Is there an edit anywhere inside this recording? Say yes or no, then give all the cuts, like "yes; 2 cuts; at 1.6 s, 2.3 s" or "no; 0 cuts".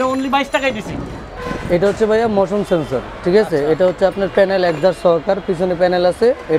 yes; 1 cut; at 1.2 s